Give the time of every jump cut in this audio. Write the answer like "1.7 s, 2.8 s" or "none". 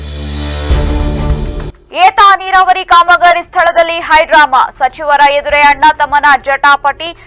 none